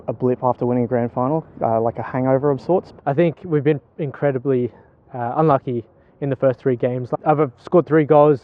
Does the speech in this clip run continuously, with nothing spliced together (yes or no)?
no